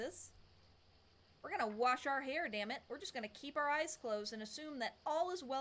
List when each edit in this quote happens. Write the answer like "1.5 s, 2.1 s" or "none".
none